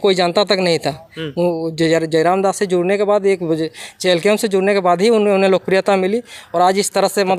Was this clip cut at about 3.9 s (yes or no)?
no